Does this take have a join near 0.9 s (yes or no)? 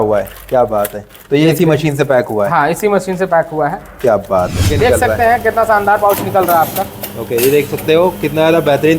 no